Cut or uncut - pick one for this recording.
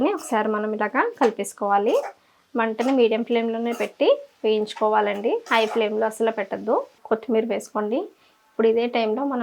cut